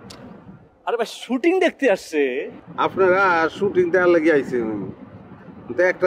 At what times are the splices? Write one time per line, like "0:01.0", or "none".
0:02.6